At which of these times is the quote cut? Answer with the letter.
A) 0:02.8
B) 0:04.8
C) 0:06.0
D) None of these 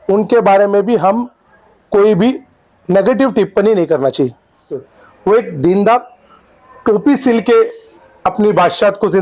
B